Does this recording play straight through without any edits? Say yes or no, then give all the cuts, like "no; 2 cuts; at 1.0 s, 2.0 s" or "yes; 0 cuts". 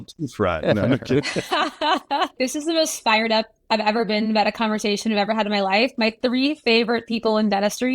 no; 1 cut; at 1.5 s